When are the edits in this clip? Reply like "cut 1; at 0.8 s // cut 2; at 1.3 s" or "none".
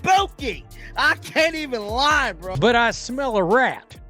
cut 1; at 2.5 s